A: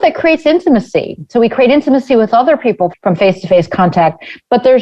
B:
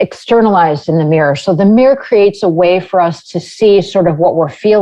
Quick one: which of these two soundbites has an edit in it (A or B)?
A